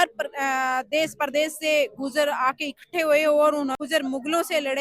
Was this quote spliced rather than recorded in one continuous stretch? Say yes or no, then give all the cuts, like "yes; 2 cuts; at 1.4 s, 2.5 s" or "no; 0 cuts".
yes; 1 cut; at 3.8 s